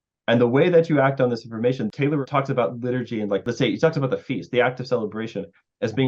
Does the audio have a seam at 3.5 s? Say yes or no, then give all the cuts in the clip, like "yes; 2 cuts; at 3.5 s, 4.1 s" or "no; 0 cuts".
yes; 2 cuts; at 1.9 s, 3.5 s